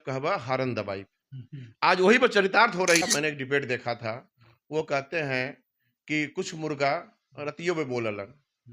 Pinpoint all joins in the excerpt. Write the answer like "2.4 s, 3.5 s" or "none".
3.0 s